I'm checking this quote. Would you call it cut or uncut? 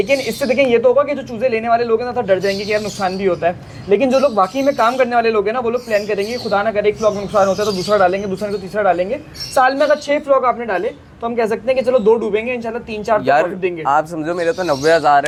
uncut